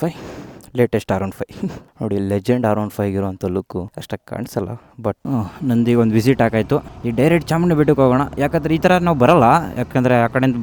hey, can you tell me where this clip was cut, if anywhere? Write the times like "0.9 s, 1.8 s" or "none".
none